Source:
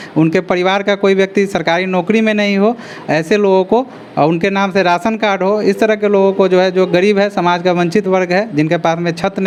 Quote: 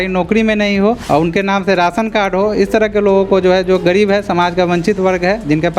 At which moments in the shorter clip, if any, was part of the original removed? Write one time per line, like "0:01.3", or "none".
0:01.0